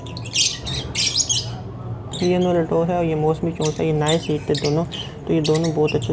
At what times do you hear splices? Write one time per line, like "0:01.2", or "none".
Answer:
0:02.1